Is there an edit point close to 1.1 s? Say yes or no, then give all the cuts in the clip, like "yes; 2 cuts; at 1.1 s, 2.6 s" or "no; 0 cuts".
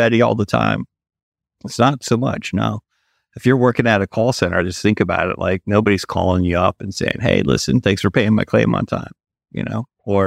no; 0 cuts